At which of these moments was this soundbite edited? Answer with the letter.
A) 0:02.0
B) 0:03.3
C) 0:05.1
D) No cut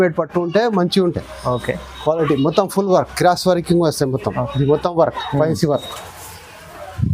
D